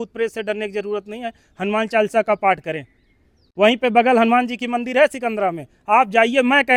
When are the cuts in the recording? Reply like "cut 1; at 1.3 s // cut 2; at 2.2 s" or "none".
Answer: none